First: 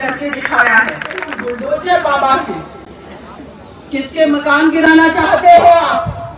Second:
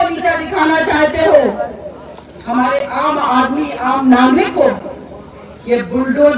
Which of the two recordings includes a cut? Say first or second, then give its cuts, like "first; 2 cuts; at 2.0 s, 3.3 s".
first; 1 cut; at 1.3 s